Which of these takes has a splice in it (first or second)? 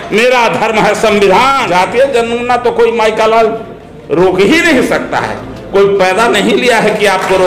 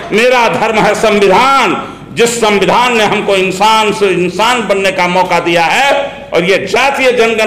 first